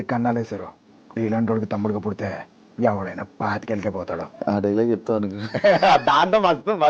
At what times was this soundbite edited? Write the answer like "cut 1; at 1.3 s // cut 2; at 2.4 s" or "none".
cut 1; at 4.3 s

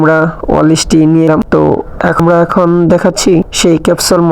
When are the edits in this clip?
cut 1; at 2.2 s

